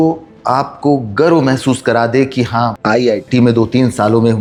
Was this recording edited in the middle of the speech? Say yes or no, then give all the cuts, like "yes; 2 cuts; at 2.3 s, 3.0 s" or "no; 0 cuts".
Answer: no; 0 cuts